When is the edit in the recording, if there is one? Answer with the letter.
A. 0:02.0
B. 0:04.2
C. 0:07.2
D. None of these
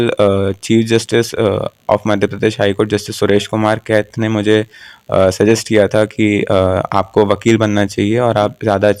D